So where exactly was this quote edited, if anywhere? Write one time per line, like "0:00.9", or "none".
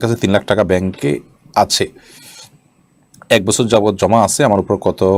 none